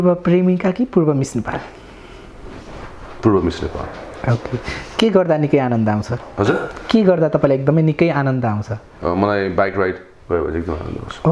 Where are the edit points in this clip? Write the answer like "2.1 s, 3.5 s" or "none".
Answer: none